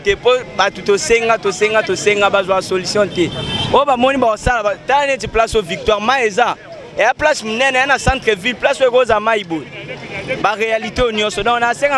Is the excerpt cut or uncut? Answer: uncut